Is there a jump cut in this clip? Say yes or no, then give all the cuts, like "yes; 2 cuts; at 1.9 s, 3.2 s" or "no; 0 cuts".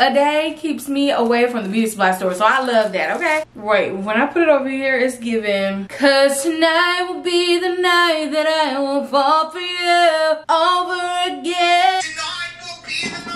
yes; 1 cut; at 3.4 s